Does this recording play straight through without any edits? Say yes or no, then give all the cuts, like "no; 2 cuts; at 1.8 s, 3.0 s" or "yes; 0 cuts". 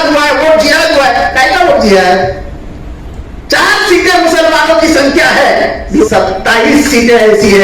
no; 1 cut; at 6.0 s